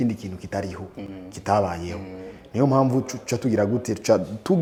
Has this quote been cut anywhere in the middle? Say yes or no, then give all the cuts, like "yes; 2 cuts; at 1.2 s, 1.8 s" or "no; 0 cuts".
no; 0 cuts